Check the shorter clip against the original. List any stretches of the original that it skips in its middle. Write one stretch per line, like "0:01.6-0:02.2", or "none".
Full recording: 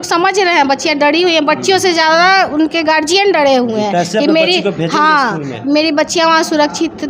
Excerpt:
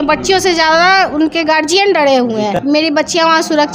0:03.9-0:05.6